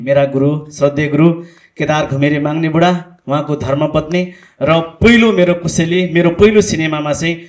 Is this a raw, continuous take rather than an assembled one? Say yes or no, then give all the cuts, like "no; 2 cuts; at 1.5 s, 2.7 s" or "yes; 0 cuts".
yes; 0 cuts